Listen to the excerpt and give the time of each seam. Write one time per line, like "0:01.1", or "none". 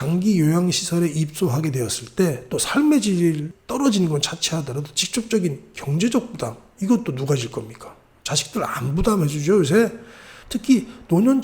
0:09.9